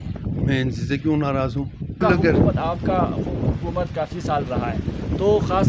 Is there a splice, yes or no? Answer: yes